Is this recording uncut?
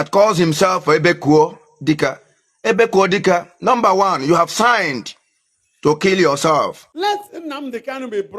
no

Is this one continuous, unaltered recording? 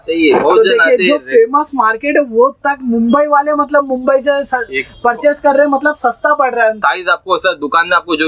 no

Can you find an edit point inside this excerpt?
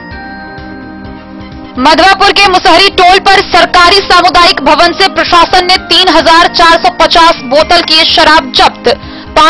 yes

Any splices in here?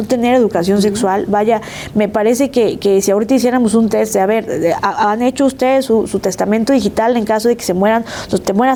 no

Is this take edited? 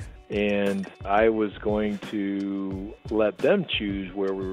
yes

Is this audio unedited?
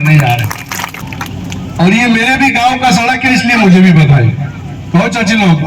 no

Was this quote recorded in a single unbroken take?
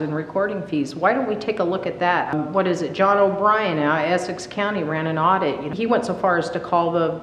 no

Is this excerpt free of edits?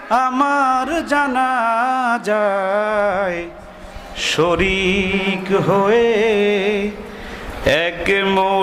yes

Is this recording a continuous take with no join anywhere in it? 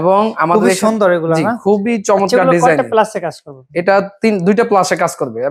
yes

